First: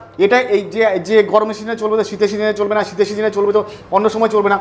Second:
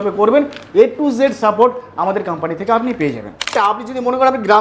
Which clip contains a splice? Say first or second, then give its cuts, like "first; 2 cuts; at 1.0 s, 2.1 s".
second; 1 cut; at 3.5 s